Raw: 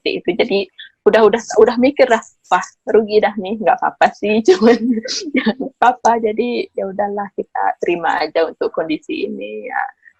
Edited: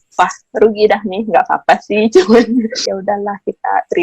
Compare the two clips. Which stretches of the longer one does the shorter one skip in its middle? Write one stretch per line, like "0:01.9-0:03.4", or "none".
0:05.2-0:06.7